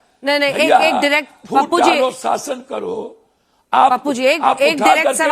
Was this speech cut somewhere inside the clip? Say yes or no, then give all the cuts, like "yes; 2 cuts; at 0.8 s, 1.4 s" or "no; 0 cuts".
no; 0 cuts